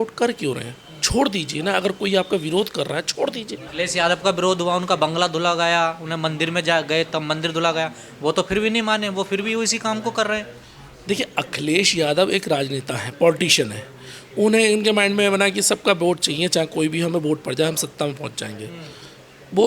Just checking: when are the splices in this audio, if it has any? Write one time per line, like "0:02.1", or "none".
0:03.6